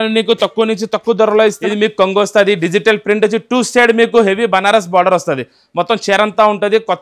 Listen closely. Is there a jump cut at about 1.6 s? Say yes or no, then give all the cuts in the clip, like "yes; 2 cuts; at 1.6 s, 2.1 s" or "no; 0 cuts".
yes; 1 cut; at 1.6 s